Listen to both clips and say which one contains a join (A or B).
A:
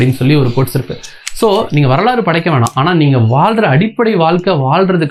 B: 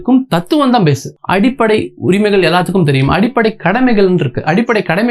B